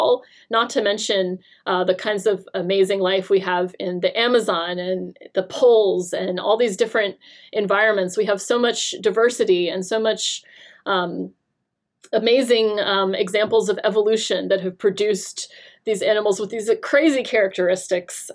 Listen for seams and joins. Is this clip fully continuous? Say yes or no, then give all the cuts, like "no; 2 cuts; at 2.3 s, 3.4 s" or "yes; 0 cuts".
yes; 0 cuts